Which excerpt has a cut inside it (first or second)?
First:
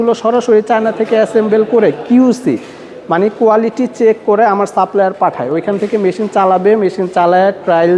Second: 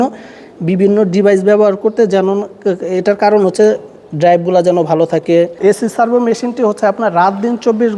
second